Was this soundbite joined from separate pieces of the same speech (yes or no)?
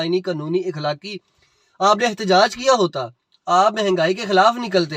no